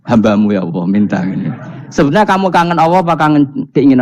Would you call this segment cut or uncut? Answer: uncut